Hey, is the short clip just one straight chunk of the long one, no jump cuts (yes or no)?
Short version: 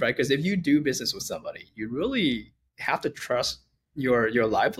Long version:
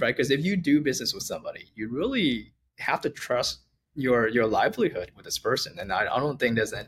yes